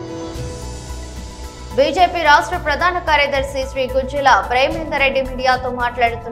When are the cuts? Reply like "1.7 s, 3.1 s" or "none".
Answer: 1.2 s